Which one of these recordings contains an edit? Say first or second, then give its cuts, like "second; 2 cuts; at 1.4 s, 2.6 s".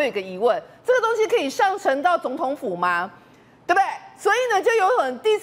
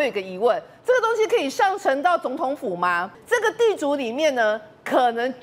second; 1 cut; at 3.2 s